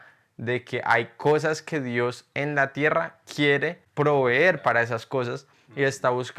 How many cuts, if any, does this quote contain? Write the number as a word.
one